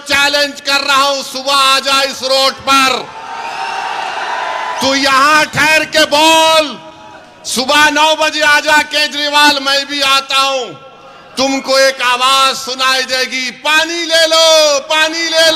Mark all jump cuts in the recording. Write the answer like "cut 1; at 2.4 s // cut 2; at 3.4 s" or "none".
none

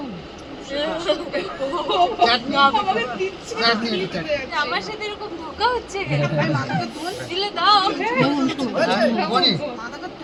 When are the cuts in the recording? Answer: none

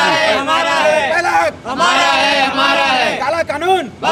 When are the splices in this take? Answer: none

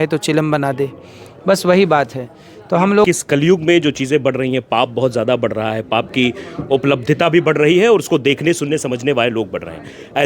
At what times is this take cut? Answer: cut 1; at 3.1 s

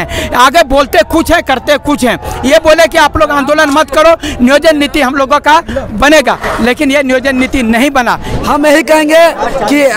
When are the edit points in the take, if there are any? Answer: cut 1; at 8.3 s

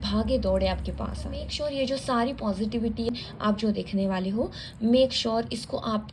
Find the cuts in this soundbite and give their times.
cut 1; at 1.5 s // cut 2; at 3.1 s

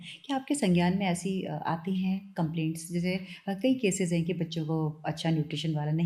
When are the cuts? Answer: none

